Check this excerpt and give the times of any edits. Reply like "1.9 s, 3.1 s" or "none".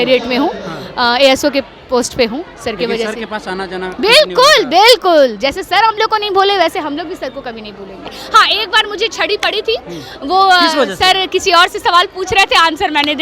8.1 s